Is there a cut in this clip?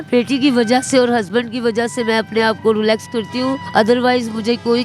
yes; 1 cut; at 3.6 s

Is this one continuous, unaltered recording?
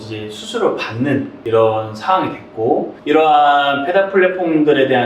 no; 2 cuts; at 1.4 s, 2.9 s

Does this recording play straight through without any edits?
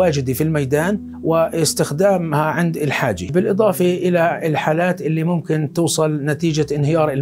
no; 1 cut; at 3.2 s

